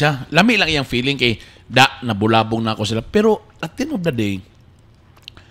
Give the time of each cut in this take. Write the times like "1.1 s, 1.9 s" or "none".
none